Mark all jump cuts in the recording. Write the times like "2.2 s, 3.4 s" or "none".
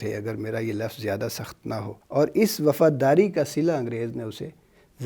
2.0 s